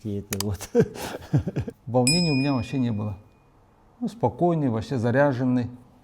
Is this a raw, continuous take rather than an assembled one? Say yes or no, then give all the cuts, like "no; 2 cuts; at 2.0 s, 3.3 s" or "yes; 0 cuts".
no; 1 cut; at 1.7 s